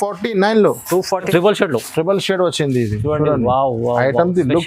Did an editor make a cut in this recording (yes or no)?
yes